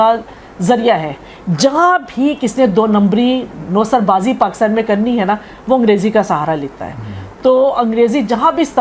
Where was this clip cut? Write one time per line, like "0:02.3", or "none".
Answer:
none